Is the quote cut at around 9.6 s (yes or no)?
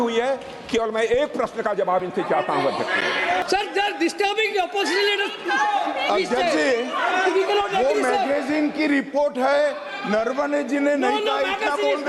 no